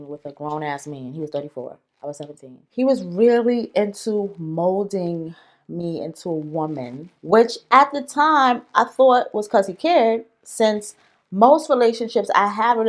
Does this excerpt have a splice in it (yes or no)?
yes